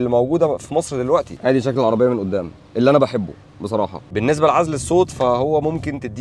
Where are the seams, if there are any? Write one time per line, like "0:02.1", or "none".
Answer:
0:01.3
0:04.0